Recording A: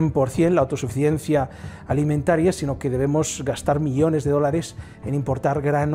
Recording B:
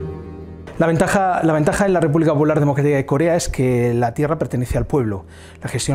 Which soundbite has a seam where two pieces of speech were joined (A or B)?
A